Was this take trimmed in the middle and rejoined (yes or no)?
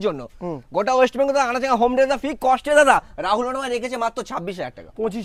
no